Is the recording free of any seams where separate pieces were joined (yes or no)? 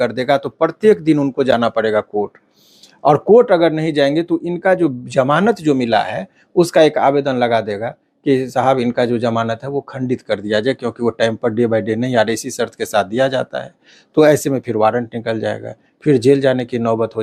yes